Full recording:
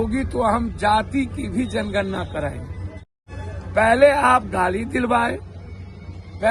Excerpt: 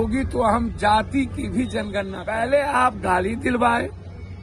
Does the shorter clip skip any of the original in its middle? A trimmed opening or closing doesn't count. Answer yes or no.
yes